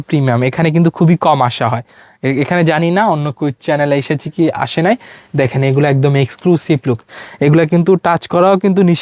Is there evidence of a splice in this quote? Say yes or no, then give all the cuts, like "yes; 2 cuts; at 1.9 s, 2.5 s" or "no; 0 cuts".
no; 0 cuts